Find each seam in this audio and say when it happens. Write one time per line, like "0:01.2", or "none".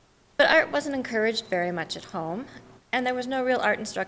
0:02.9